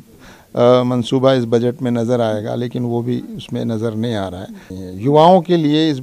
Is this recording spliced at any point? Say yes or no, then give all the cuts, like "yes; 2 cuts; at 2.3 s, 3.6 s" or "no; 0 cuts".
yes; 1 cut; at 4.7 s